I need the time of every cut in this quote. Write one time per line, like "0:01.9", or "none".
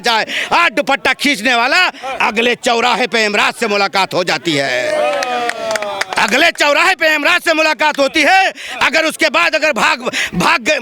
none